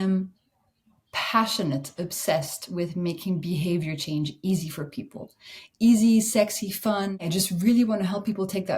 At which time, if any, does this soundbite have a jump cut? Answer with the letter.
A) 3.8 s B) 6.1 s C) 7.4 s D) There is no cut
C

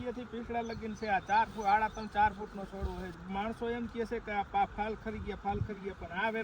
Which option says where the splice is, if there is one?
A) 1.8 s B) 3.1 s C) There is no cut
B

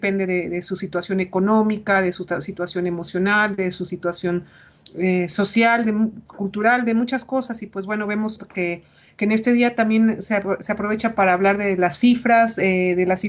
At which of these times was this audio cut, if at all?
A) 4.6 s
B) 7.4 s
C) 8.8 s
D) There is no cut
D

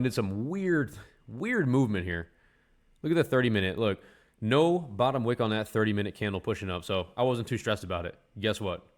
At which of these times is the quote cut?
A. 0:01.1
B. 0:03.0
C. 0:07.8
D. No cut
D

